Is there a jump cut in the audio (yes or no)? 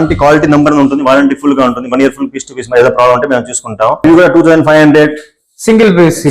yes